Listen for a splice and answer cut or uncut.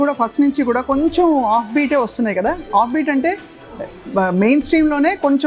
uncut